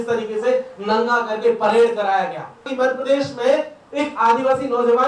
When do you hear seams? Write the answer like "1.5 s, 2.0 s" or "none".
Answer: 2.7 s